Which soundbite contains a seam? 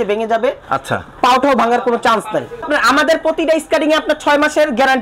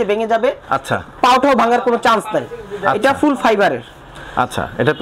first; 1 cut; at 2.7 s

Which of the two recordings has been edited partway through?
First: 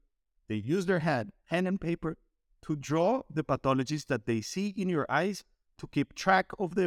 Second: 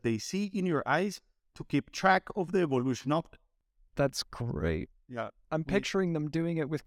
second; 1 cut; at 3.9 s

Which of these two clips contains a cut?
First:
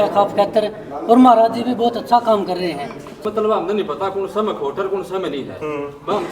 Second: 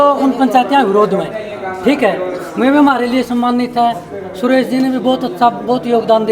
first; 1 cut; at 3.2 s

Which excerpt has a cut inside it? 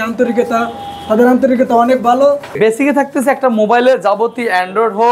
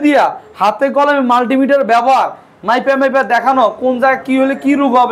first; 1 cut; at 2.5 s

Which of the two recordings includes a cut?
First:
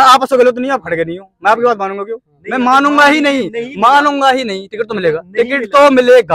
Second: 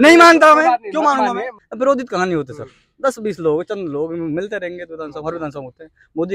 second; 1 cut; at 1.6 s

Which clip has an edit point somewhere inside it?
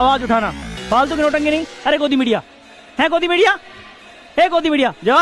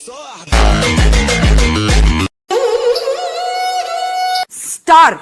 second; 1 cut; at 2.5 s

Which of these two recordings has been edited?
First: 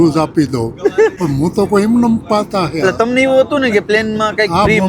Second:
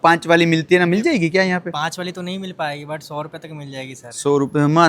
first; 1 cut; at 1.2 s

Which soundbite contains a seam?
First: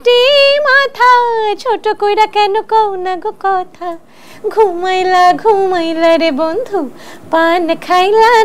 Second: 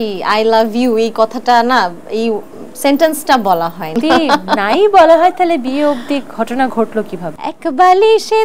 second; 2 cuts; at 4.0 s, 7.3 s

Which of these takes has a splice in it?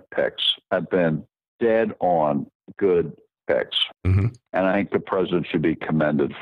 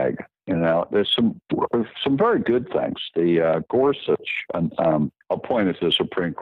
second; 1 cut; at 2.4 s

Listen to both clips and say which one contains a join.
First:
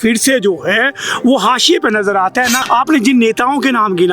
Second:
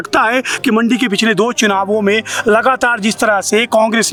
first; 1 cut; at 2.6 s

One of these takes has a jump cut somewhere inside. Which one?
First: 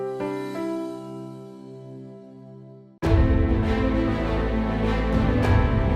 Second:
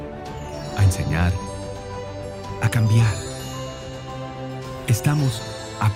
first; 1 cut; at 2.8 s

